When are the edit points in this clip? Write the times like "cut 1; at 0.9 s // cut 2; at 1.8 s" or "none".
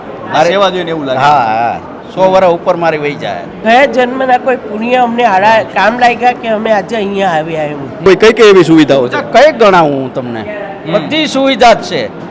cut 1; at 3.5 s // cut 2; at 8.1 s

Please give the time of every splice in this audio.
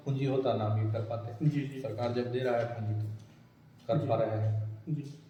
none

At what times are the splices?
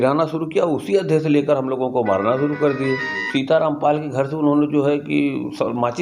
cut 1; at 3.2 s

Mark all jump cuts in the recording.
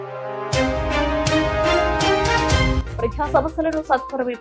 cut 1; at 2.8 s

